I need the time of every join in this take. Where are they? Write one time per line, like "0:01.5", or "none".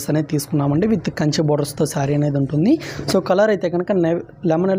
none